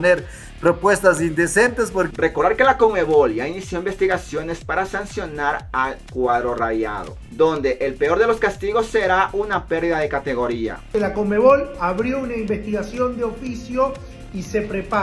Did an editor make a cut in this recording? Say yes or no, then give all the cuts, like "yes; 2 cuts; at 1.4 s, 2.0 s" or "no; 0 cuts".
yes; 2 cuts; at 2.1 s, 10.9 s